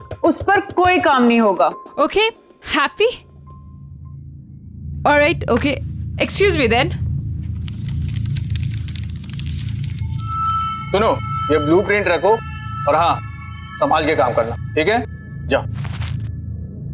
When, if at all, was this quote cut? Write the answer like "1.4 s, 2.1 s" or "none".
15.7 s